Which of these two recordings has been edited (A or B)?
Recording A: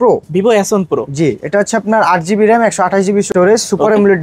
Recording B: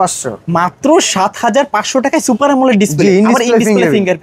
A